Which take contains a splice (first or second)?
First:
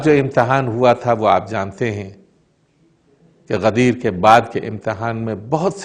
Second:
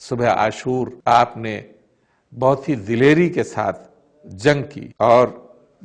second